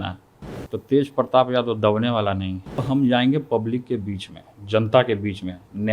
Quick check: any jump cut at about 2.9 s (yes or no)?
yes